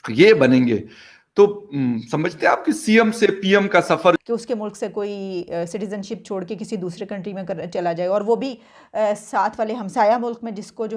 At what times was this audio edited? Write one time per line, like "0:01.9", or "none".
0:04.2